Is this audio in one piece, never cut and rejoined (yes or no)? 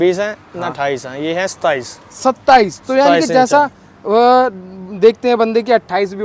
yes